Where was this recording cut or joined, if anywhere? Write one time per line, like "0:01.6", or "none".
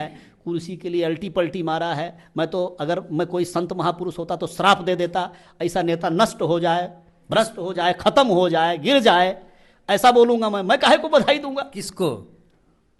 none

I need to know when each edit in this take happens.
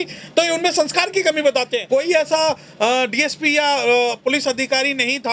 0:01.8

